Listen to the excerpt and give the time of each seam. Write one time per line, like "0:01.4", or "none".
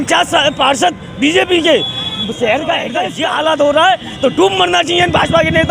0:03.1